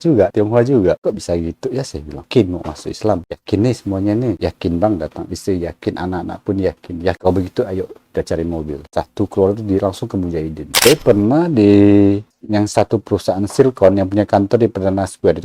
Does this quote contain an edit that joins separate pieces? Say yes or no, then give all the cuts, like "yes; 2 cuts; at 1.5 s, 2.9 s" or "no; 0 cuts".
yes; 4 cuts; at 2.2 s, 3.2 s, 7.2 s, 10.6 s